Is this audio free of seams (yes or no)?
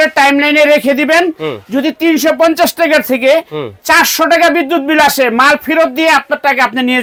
yes